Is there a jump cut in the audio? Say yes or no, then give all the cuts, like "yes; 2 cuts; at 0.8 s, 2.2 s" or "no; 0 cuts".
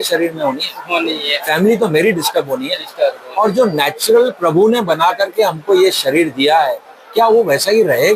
no; 0 cuts